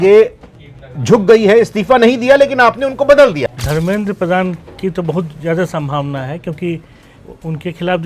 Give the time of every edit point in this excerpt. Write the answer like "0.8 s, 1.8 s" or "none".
3.5 s